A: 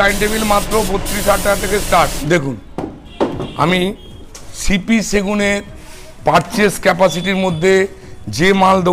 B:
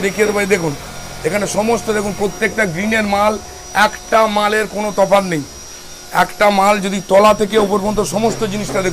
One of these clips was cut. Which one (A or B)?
A